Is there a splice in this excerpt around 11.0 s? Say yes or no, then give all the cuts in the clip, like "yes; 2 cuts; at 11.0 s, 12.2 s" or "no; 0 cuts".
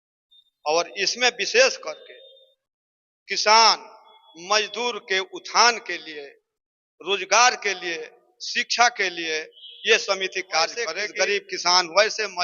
yes; 1 cut; at 11.0 s